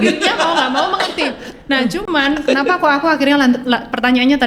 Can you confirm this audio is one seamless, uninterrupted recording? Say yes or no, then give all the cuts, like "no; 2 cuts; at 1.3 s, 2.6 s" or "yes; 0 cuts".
yes; 0 cuts